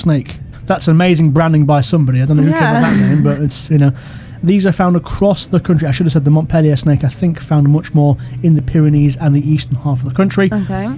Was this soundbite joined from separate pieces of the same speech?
no; 0 cuts

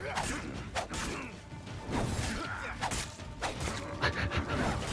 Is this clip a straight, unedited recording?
yes; 0 cuts

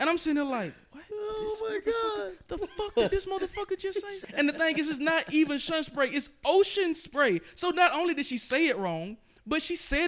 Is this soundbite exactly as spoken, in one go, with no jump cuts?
no; 1 cut; at 4.2 s

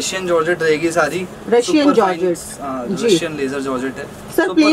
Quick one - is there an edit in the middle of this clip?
no; 0 cuts

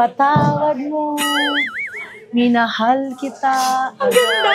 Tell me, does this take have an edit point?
no; 0 cuts

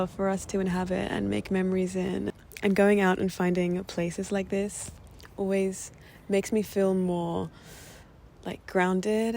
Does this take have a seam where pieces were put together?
no; 0 cuts

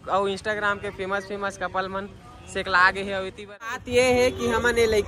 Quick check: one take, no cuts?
no; 1 cut; at 3.8 s

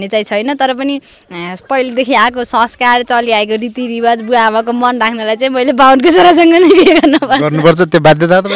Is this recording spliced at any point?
no; 0 cuts

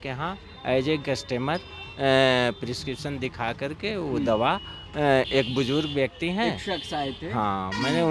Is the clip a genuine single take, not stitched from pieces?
yes; 0 cuts

